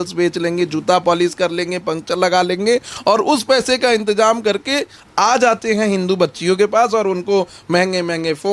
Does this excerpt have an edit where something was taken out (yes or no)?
yes